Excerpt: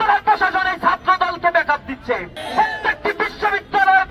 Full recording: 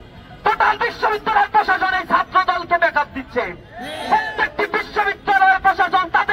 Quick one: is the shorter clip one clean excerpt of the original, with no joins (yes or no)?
no